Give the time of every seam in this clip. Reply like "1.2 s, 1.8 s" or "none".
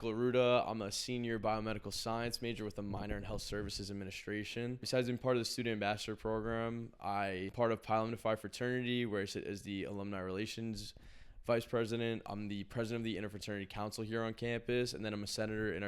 4.8 s, 7.5 s, 12.3 s